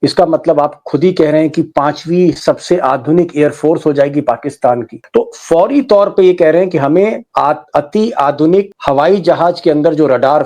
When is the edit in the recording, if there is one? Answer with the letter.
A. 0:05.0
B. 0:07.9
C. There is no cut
A